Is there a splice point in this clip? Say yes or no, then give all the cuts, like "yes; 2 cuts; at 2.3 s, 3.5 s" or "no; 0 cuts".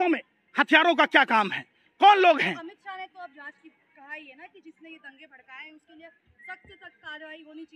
no; 0 cuts